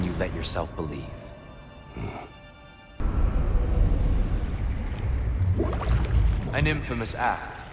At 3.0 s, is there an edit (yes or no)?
yes